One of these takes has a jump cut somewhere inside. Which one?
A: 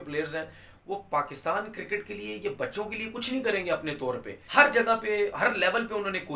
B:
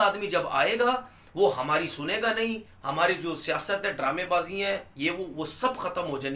A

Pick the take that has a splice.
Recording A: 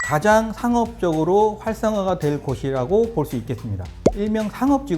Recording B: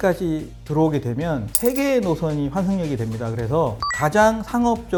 A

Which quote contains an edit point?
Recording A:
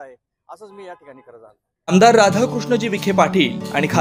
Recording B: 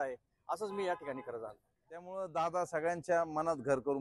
B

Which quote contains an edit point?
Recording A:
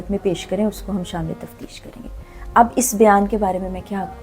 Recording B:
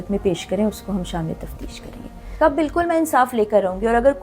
B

